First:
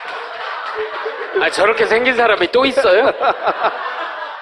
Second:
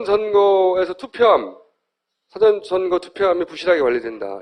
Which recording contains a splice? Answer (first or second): first